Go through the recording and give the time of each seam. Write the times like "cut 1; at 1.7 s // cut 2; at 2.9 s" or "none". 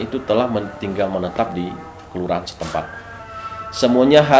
cut 1; at 3.2 s